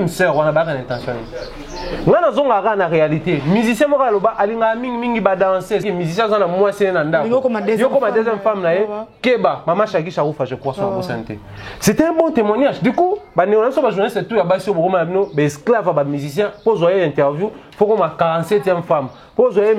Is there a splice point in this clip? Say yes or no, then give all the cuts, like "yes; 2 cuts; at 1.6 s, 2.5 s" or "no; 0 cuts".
yes; 1 cut; at 5.8 s